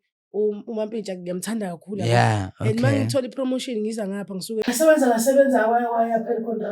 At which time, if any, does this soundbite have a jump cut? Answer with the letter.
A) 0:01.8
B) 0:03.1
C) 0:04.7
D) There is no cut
C